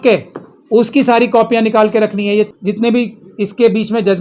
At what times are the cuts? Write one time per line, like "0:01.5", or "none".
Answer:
0:02.5

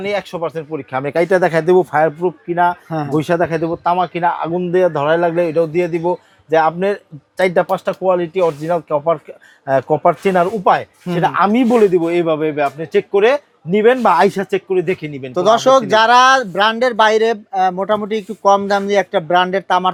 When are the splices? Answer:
none

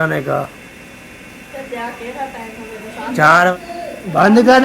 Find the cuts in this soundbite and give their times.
0:03.5

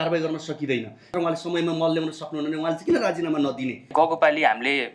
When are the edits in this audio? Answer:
0:01.1
0:03.9

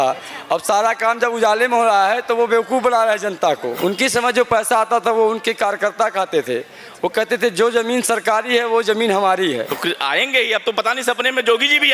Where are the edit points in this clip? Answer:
0:03.8
0:09.7

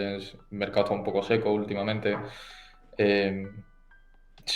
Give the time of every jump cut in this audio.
none

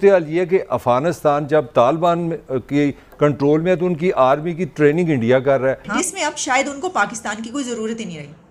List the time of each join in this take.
0:05.8

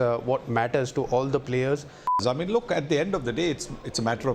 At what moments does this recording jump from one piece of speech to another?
0:02.2

